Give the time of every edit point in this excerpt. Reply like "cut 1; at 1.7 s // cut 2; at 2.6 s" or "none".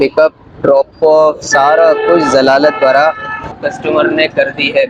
cut 1; at 3.6 s